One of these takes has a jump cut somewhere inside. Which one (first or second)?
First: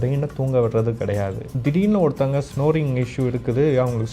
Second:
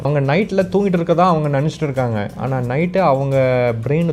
first